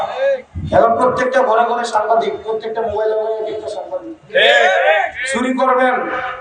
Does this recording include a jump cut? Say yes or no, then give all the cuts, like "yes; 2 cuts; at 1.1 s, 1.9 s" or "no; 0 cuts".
no; 0 cuts